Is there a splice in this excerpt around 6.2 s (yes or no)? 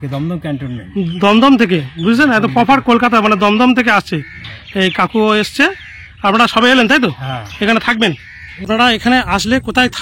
no